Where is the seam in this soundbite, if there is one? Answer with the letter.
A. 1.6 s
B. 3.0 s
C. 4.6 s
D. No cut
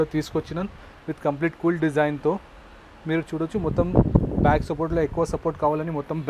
D